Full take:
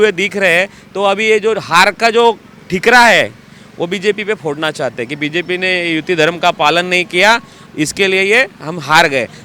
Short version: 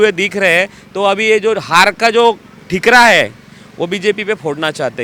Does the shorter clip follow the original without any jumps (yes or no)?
yes